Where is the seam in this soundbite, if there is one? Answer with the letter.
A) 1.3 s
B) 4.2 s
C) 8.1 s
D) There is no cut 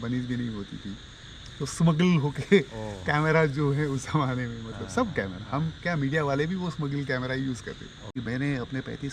C